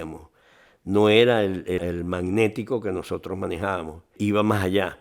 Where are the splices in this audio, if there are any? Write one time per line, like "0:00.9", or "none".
none